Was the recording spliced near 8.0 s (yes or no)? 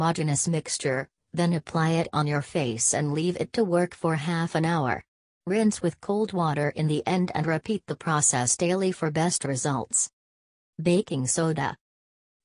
yes